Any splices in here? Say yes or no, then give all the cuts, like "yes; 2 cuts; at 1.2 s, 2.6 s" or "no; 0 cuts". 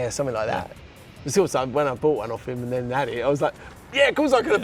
no; 0 cuts